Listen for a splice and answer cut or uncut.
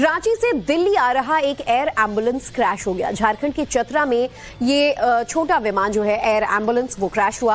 cut